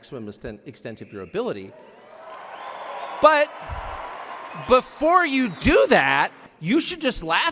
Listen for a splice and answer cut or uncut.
cut